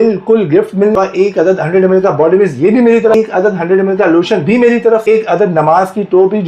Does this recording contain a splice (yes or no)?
yes